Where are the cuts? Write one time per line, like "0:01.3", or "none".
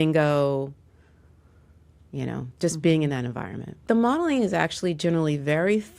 0:03.8